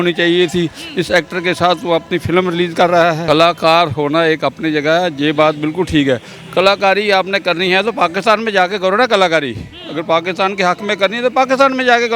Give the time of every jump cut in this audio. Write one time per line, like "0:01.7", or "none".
0:03.2